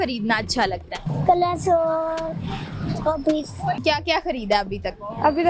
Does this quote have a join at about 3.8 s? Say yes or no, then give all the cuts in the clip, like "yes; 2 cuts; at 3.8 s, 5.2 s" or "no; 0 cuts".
yes; 2 cuts; at 1.1 s, 3.8 s